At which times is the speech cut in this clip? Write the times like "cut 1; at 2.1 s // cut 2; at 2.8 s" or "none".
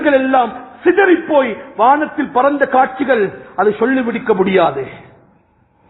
none